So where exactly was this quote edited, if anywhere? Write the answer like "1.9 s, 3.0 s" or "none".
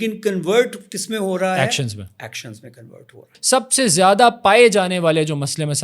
3.4 s